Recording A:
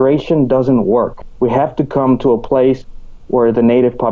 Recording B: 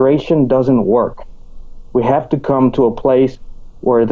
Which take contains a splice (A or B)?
A